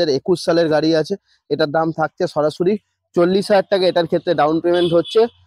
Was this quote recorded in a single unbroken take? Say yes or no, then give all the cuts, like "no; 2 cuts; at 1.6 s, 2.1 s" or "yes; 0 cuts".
yes; 0 cuts